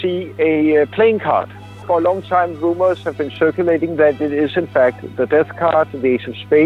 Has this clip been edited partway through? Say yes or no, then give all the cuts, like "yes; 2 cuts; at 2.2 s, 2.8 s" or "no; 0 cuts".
yes; 1 cut; at 1.8 s